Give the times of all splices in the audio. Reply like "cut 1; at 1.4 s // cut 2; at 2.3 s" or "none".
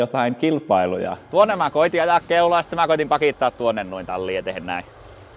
cut 1; at 1.2 s